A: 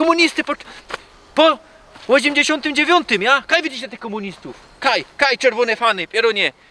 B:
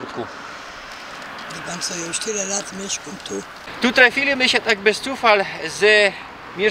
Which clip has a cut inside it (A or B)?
B